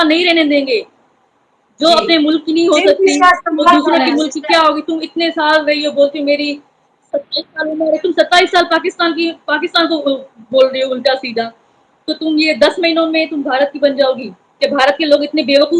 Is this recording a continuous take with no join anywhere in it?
yes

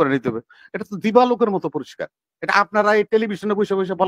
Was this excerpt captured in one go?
yes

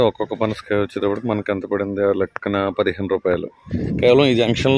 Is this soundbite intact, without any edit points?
no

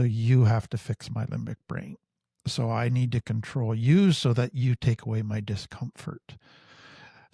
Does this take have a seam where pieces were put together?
no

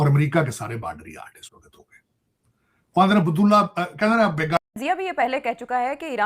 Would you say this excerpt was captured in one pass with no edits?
no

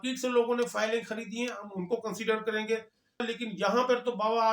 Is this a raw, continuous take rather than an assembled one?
no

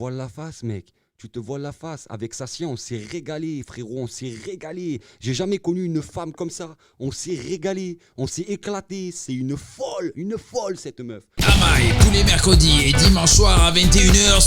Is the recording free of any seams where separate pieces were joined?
no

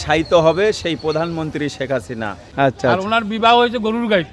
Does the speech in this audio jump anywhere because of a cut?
yes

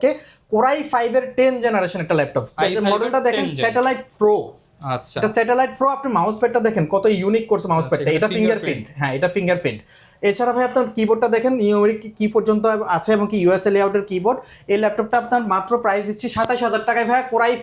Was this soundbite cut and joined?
no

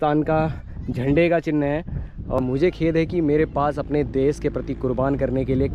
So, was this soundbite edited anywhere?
yes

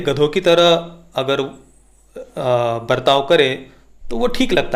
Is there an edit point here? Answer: no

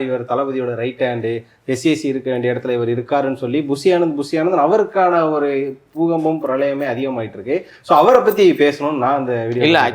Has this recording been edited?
no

